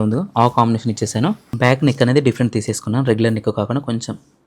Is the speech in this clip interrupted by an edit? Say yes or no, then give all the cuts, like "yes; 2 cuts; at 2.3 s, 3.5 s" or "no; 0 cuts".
yes; 1 cut; at 1.5 s